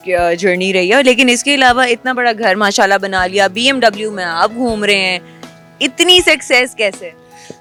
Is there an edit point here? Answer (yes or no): no